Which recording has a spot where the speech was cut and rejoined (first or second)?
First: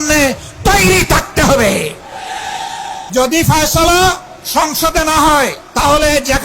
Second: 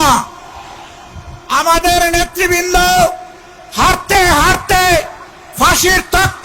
first